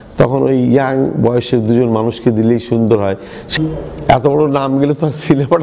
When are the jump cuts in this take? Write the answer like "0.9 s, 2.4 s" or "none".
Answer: 3.5 s

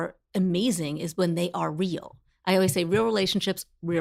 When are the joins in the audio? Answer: none

